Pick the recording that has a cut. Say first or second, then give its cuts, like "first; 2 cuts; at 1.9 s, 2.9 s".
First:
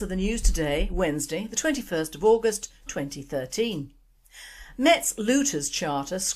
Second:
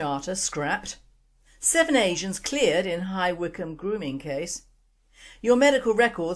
second; 1 cut; at 3.0 s